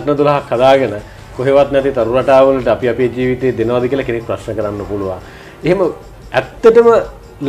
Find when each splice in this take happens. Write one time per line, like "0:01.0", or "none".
none